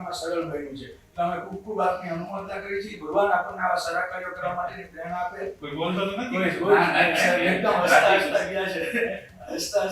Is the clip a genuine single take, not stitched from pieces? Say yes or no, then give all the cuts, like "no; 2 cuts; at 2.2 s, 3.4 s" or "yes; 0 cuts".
no; 1 cut; at 5.6 s